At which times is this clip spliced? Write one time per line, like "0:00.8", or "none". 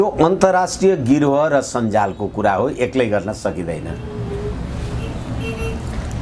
none